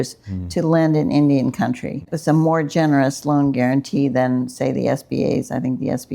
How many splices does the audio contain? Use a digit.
1